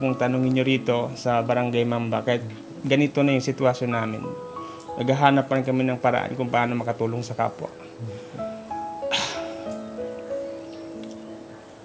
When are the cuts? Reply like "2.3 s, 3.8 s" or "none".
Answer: none